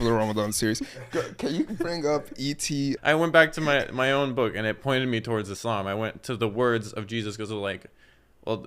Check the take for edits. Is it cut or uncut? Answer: cut